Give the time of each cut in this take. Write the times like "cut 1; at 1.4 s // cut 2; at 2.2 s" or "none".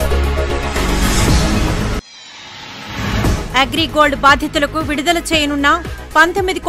cut 1; at 2.2 s